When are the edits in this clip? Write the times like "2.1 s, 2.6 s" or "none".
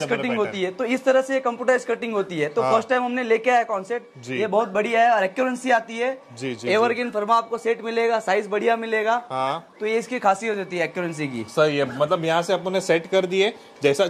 none